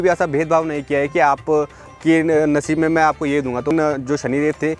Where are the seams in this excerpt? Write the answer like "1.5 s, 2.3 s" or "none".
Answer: 3.7 s